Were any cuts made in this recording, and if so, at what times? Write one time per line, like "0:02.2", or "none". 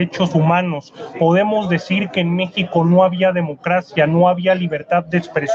none